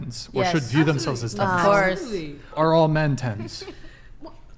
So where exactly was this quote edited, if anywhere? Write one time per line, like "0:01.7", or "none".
0:02.5